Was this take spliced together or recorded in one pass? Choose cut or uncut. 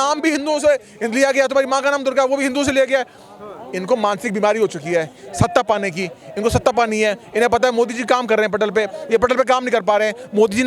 uncut